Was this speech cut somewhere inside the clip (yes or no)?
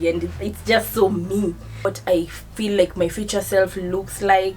yes